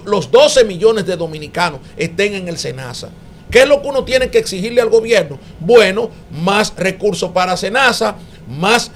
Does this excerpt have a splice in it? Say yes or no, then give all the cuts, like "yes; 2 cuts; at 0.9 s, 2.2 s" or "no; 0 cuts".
no; 0 cuts